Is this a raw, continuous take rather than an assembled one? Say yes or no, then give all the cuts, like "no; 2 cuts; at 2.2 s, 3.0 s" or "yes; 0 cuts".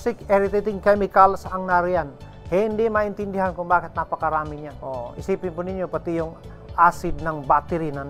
no; 1 cut; at 4.7 s